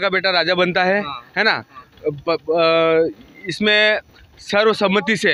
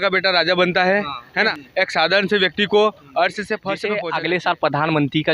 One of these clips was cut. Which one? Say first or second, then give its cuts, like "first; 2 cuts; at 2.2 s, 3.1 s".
second; 2 cuts; at 1.6 s, 3.9 s